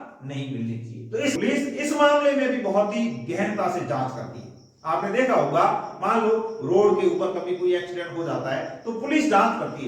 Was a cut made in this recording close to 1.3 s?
yes; 1 cut; at 1.3 s

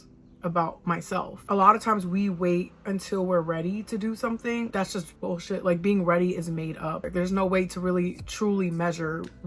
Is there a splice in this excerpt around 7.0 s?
yes; 3 cuts; at 1.4 s, 4.7 s, 7.0 s

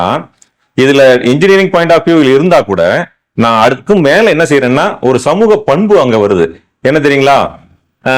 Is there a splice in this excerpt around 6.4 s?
no; 0 cuts

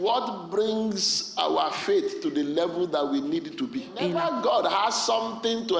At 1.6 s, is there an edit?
no; 1 cut; at 4.1 s

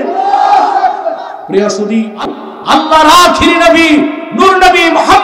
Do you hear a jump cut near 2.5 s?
yes; 1 cut; at 2.5 s

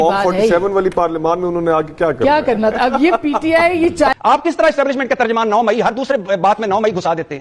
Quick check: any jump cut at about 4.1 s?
yes; 1 cut; at 4.1 s

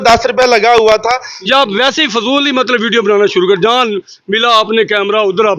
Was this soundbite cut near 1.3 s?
yes; 1 cut; at 1.3 s

